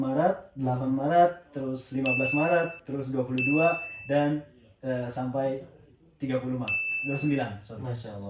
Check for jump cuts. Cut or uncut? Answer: uncut